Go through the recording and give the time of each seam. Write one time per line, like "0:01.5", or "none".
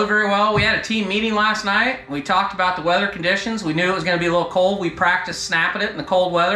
none

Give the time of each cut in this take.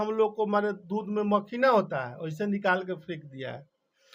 none

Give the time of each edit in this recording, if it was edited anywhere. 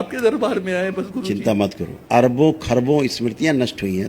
0:01.9

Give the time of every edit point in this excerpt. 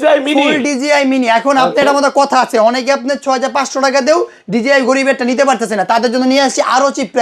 none

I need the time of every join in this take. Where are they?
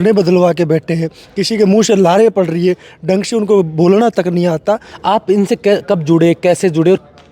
0:04.9

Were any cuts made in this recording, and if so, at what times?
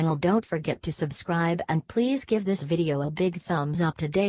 none

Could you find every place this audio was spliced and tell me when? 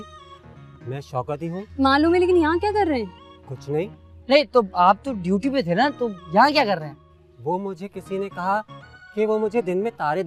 none

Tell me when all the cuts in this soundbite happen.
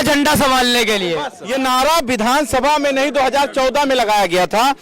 0:01.4

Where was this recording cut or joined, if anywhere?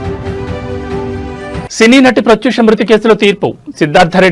0:01.1

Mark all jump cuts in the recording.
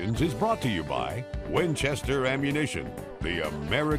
none

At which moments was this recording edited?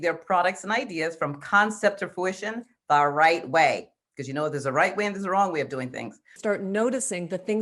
0:06.3

